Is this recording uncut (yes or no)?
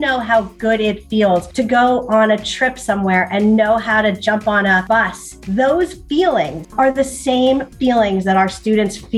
no